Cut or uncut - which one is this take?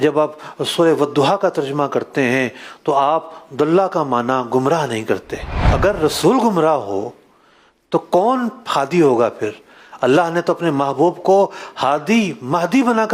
uncut